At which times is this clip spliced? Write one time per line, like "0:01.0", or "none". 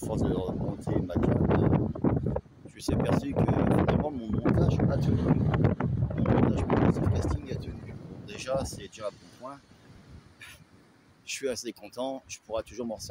none